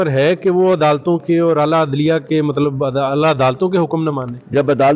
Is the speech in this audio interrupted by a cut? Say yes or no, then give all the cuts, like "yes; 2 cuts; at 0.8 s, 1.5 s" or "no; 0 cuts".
no; 0 cuts